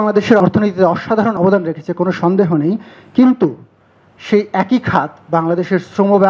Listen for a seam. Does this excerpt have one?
no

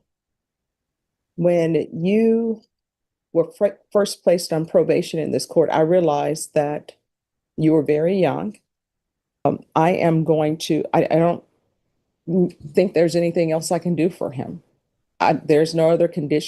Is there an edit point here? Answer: yes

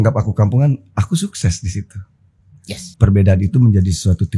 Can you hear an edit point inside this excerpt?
yes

